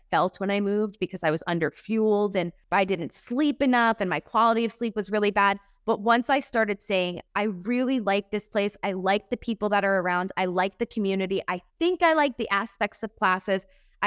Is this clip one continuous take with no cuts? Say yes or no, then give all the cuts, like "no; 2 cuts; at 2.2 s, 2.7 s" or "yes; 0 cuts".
no; 1 cut; at 2.6 s